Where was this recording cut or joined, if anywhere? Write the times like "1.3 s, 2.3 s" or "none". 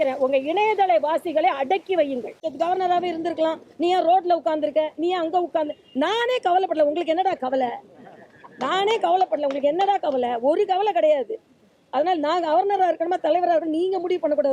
2.4 s